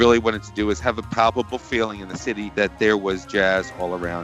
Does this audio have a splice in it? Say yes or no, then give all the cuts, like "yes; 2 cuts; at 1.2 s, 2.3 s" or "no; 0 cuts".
no; 0 cuts